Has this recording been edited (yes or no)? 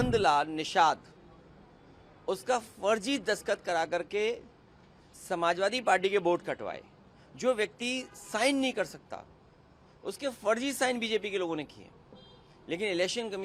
no